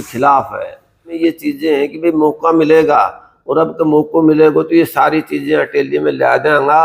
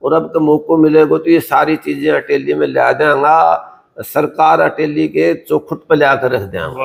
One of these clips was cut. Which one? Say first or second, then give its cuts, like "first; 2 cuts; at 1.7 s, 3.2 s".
first; 1 cut; at 1.2 s